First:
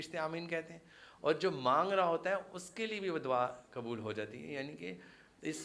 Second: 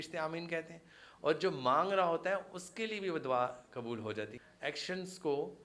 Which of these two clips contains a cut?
second; 1 cut; at 4.4 s

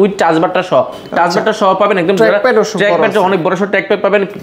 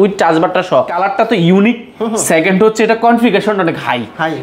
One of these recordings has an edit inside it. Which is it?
second; 1 cut; at 1.0 s

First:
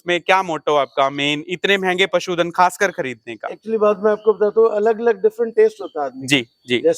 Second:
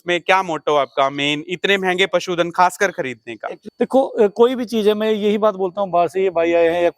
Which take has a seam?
second; 1 cut; at 3.6 s

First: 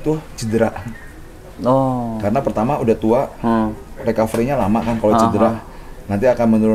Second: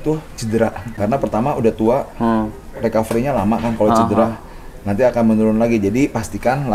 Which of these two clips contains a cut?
second; 1 cut; at 0.9 s

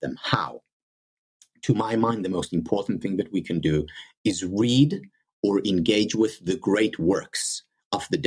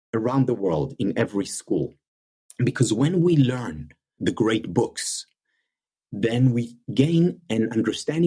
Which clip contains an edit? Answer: second; 2 cuts; at 4.2 s, 6.8 s

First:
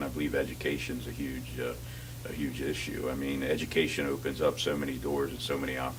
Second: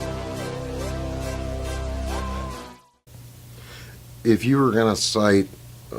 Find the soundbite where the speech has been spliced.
second; 1 cut; at 2.7 s

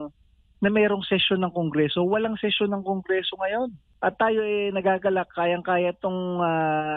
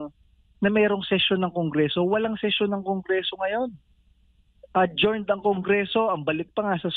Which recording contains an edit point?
first; 1 cut; at 3.8 s

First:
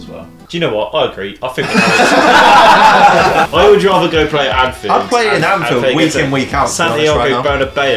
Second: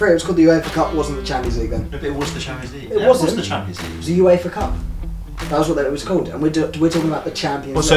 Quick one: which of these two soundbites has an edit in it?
first; 1 cut; at 3.5 s

